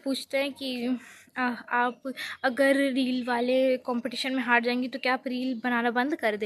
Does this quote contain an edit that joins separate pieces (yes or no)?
no